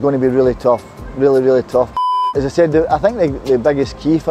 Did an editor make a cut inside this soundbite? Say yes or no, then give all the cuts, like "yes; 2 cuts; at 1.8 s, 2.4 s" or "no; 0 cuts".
yes; 1 cut; at 2.2 s